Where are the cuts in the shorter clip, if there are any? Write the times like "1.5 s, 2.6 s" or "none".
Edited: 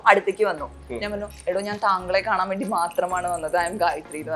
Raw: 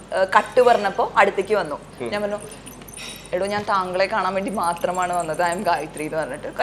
1.3 s